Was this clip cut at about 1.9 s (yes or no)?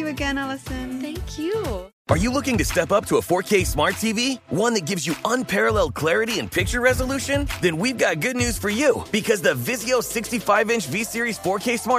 yes